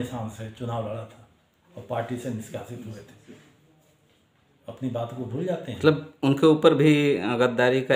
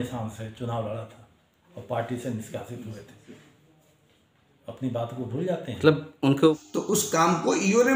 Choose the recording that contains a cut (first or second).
second